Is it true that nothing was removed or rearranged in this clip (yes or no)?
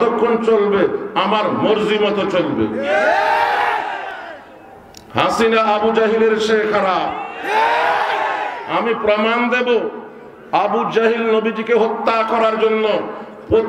yes